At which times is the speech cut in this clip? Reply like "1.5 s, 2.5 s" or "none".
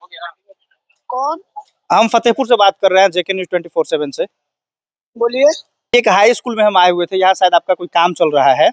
5.9 s